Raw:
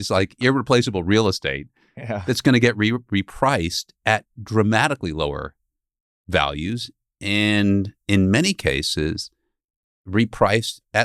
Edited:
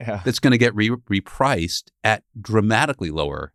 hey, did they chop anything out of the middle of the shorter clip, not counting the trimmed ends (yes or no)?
no